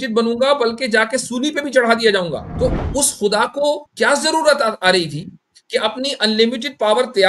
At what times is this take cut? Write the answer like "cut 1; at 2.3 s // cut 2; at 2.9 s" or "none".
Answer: cut 1; at 2.5 s // cut 2; at 3.9 s